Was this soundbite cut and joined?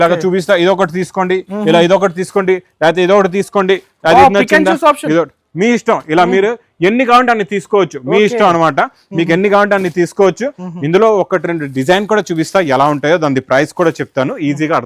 no; 0 cuts

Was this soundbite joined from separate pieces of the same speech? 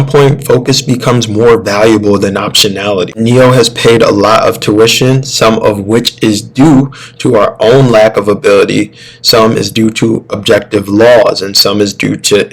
yes; 1 cut; at 3.2 s

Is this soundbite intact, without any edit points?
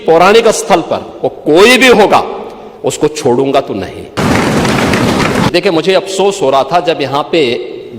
no; 2 cuts; at 4.2 s, 5.5 s

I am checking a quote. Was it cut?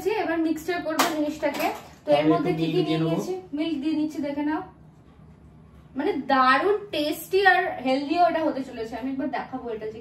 no; 0 cuts

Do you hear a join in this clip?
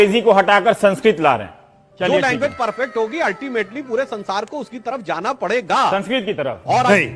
no; 0 cuts

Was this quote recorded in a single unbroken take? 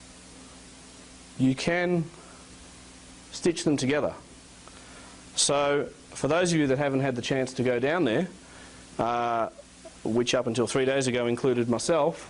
no; 1 cut; at 2.4 s

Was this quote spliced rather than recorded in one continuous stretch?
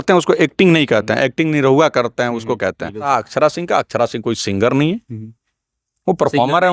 yes; 1 cut; at 3.1 s

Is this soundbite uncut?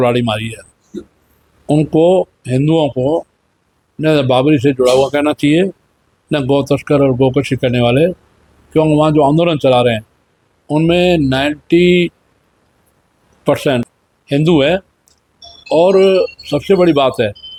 yes; 0 cuts

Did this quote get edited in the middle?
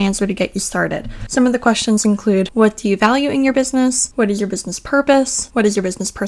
no; 0 cuts

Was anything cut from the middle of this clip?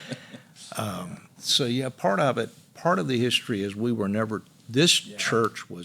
yes; 1 cut; at 1.4 s

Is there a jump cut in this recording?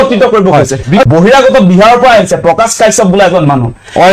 yes; 1 cut; at 1.0 s

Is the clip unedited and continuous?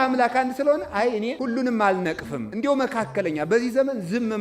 no; 2 cuts; at 1.4 s, 2.5 s

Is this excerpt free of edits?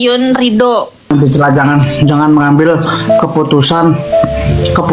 no; 1 cut; at 1.1 s

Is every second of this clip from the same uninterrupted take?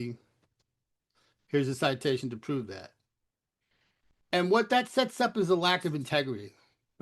yes; 0 cuts

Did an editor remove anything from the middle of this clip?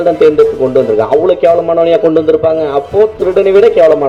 no; 0 cuts

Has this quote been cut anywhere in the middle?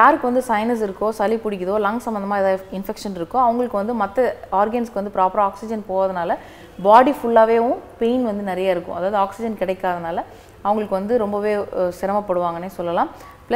no; 0 cuts

